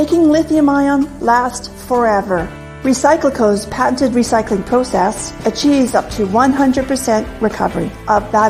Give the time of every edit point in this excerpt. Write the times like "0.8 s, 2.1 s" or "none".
1.5 s